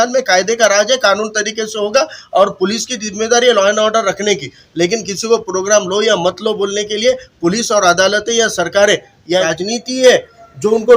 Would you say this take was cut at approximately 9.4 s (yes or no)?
yes